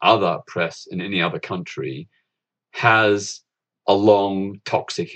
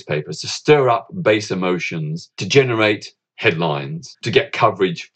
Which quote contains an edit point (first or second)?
second